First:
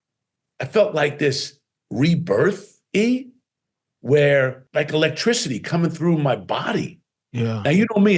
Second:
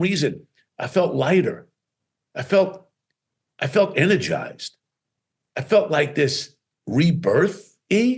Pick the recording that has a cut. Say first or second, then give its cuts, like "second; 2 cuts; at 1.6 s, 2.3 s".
first; 1 cut; at 4.6 s